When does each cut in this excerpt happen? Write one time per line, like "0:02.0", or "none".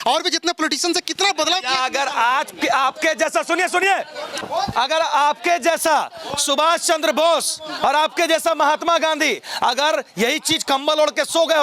0:04.4